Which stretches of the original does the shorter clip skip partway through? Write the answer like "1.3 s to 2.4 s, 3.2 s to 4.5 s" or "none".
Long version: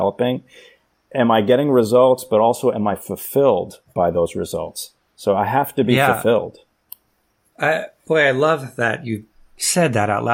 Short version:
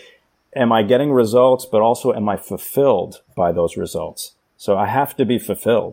none